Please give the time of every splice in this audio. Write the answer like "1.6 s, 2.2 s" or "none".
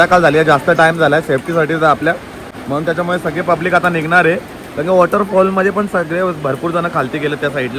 none